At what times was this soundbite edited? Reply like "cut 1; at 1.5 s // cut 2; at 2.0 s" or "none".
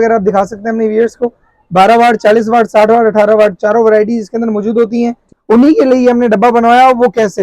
cut 1; at 5.3 s